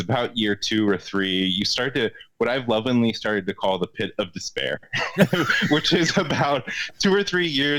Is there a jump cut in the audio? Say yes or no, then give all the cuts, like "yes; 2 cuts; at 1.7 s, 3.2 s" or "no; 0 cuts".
no; 0 cuts